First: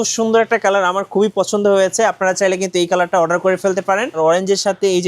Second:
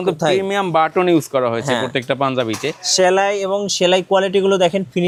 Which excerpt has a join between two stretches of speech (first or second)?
first